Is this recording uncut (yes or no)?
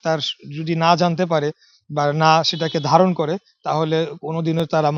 yes